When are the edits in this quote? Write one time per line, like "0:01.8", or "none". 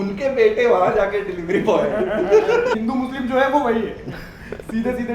0:02.7